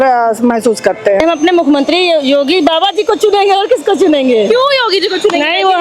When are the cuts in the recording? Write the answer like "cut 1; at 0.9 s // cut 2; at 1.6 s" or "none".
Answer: cut 1; at 1.2 s